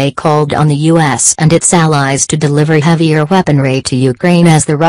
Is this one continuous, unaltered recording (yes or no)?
yes